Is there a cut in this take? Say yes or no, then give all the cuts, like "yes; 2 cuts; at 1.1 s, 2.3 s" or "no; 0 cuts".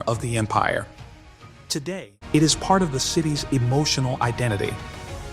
yes; 1 cut; at 1.8 s